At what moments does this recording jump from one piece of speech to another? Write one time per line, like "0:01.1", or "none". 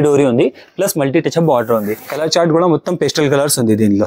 0:02.0